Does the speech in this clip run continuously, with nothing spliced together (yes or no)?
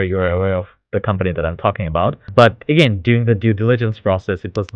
no